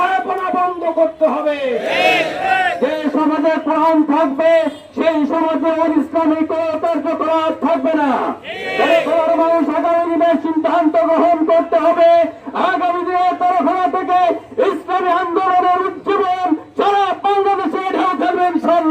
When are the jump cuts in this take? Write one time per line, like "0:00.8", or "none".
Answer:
0:02.4